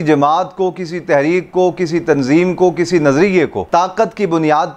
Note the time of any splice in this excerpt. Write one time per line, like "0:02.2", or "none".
0:03.6